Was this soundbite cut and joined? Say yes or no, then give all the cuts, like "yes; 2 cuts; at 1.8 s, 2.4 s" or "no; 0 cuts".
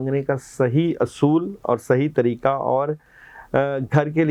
no; 0 cuts